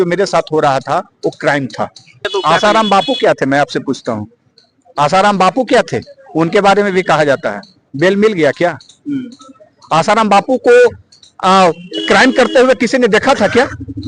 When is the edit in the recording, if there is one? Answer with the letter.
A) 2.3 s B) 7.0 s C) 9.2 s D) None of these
A